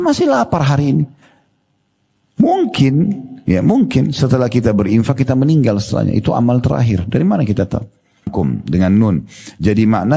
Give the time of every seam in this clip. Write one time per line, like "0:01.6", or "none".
0:08.3